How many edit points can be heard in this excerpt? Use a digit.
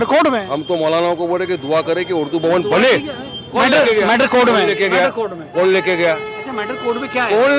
0